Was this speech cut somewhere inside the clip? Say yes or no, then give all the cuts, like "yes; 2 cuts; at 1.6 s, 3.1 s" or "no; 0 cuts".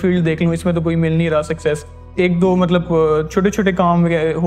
no; 0 cuts